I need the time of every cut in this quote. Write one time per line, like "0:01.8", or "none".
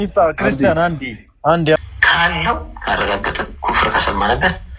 0:01.8